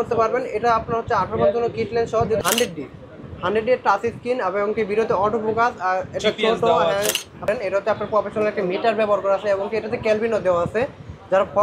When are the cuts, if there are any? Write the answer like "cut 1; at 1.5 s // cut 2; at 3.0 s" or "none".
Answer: cut 1; at 2.4 s // cut 2; at 7.5 s